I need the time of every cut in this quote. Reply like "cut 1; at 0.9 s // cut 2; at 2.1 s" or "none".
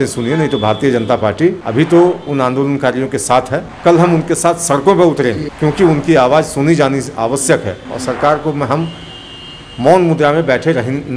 cut 1; at 1.6 s // cut 2; at 3.7 s // cut 3; at 5.5 s